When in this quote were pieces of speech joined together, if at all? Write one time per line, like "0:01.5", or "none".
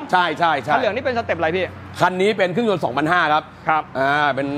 none